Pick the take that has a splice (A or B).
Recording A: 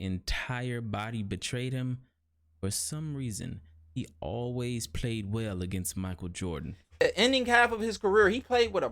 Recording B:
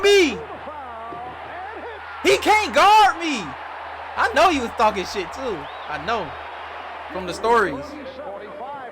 A